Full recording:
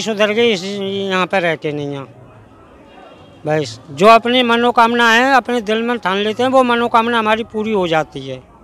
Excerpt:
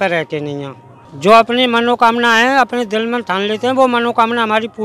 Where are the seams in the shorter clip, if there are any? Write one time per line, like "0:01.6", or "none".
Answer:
0:01.1